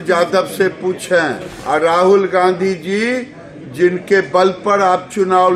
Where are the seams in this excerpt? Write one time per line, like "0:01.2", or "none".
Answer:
0:01.5